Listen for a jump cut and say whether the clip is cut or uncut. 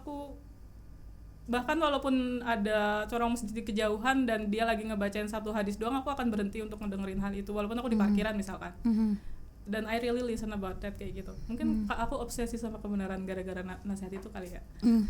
uncut